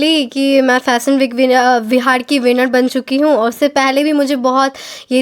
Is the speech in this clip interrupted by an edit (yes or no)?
no